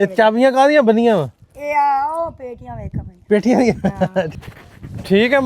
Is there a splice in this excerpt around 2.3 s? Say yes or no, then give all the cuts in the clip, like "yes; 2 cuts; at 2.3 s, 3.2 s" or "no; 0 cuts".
no; 1 cut; at 4.3 s